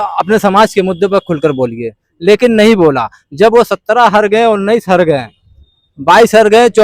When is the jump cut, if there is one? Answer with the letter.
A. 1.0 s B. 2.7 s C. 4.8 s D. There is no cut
D